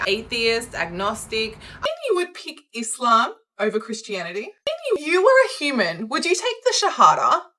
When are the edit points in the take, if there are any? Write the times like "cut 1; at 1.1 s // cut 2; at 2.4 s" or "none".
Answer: cut 1; at 1.9 s // cut 2; at 4.9 s